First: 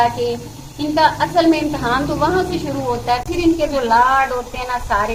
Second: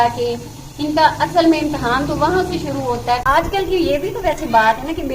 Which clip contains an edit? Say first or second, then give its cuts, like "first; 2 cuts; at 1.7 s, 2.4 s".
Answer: second; 1 cut; at 3.2 s